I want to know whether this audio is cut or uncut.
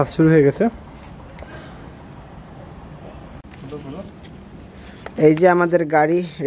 cut